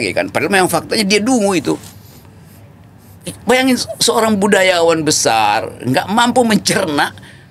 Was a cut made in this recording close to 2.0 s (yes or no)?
no